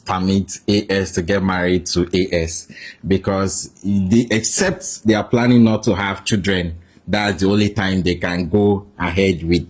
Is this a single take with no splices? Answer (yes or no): yes